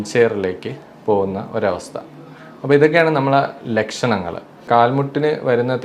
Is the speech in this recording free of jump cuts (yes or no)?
no